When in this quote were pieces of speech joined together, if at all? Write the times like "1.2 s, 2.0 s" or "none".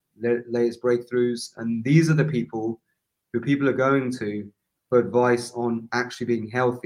none

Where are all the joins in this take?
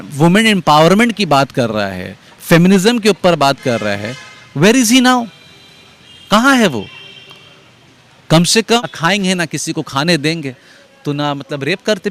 8.8 s

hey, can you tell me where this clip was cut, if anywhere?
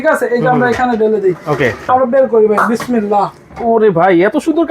1.8 s

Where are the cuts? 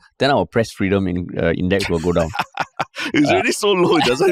none

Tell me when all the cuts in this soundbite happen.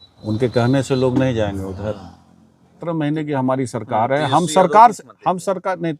2.8 s

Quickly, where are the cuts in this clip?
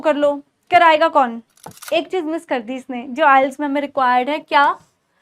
1.7 s

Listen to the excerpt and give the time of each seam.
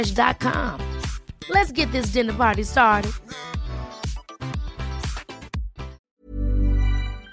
6.1 s

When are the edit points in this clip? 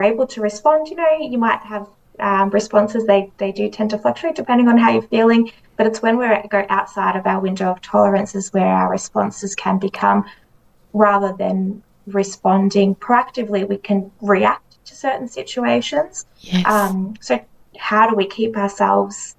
none

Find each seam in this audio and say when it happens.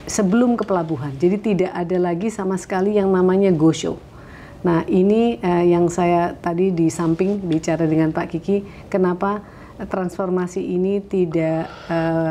none

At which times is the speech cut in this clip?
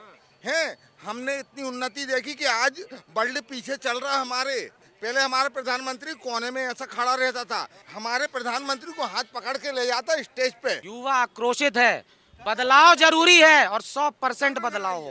4.9 s, 7.8 s, 10.9 s

